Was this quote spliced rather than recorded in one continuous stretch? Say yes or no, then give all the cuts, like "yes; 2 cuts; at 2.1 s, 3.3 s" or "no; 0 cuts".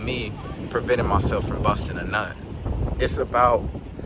yes; 1 cut; at 2.7 s